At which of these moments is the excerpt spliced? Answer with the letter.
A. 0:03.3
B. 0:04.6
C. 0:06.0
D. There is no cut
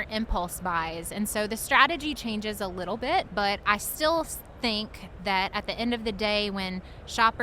A